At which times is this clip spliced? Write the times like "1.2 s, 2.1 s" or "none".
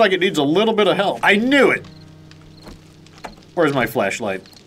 1.2 s